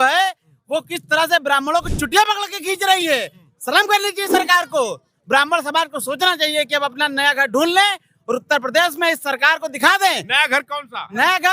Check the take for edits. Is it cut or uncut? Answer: uncut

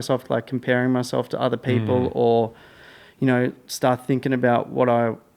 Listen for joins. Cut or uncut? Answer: uncut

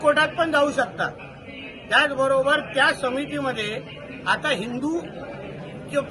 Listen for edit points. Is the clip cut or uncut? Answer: uncut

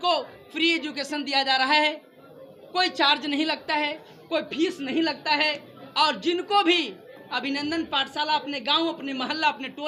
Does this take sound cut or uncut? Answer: uncut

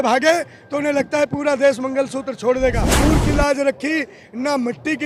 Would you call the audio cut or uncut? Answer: cut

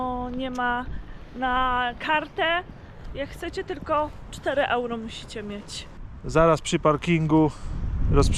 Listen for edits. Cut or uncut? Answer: uncut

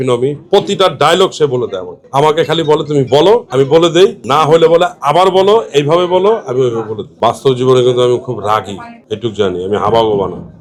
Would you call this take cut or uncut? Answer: uncut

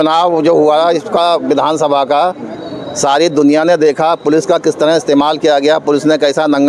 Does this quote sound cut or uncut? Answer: uncut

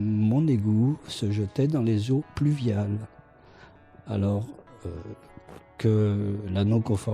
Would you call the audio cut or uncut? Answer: uncut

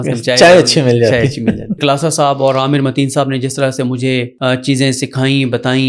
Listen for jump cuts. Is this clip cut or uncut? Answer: cut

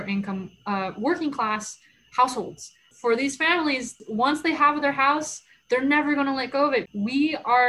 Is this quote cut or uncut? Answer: cut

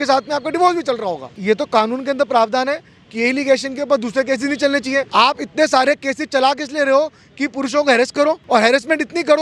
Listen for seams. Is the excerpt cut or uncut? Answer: cut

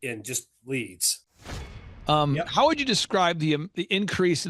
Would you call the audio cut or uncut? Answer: cut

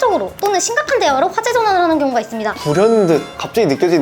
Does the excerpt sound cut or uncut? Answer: cut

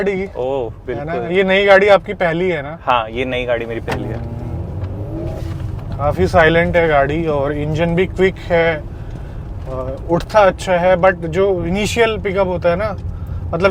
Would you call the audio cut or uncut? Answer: uncut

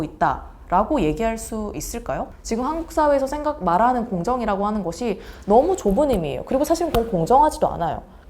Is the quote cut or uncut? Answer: cut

